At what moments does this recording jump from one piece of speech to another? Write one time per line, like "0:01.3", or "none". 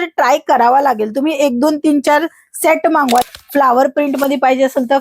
0:03.3